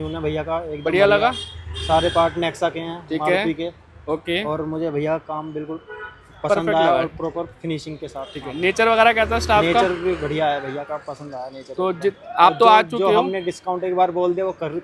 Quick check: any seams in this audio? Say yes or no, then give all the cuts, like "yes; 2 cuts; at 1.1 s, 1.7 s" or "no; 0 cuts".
no; 0 cuts